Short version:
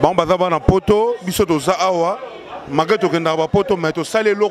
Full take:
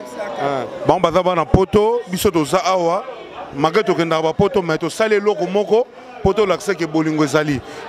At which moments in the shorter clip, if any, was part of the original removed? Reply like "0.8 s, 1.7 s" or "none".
none